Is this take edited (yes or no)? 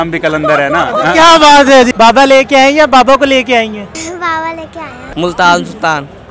yes